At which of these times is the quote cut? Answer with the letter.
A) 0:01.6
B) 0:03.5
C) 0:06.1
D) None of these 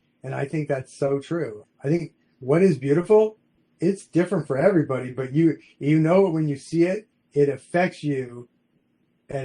A